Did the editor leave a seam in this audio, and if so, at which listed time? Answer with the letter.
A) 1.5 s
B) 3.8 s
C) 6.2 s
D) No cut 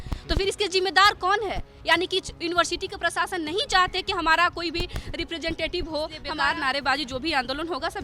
C